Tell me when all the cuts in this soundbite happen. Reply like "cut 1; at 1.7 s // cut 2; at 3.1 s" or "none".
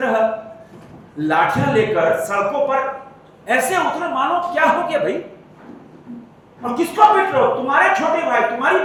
none